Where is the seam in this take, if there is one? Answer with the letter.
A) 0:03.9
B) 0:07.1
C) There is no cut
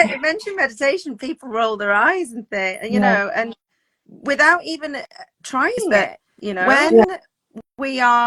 B